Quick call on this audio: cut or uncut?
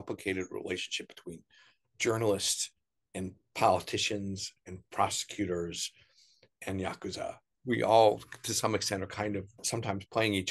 cut